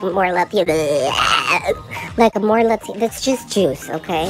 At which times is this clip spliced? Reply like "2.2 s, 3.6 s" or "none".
none